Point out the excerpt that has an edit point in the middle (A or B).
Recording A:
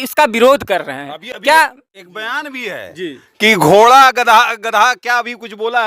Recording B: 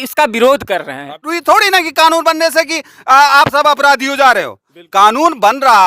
B